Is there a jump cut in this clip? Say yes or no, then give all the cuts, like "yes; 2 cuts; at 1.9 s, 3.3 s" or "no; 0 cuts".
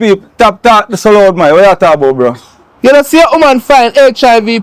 no; 0 cuts